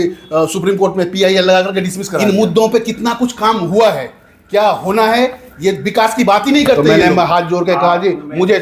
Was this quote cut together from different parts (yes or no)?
yes